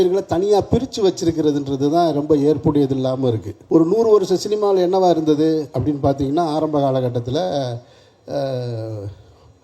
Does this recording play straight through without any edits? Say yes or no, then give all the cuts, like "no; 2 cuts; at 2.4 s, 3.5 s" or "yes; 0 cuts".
no; 1 cut; at 3.5 s